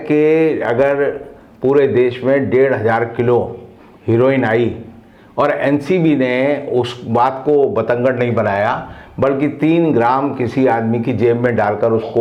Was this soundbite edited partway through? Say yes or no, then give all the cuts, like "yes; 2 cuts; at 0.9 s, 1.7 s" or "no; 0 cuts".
no; 0 cuts